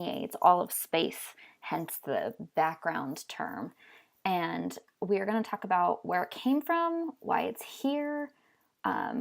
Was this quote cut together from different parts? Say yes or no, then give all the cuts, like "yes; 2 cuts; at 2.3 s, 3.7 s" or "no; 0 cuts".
yes; 1 cut; at 8.3 s